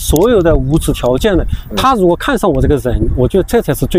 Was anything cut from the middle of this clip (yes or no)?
no